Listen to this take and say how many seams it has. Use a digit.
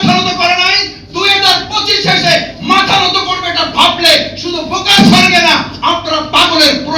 0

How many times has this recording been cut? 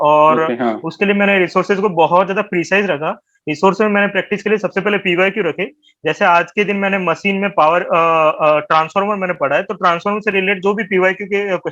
0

